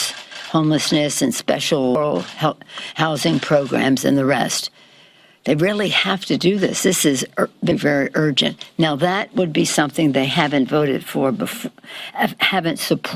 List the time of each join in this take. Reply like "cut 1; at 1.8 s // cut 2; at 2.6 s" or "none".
cut 1; at 2.0 s // cut 2; at 7.7 s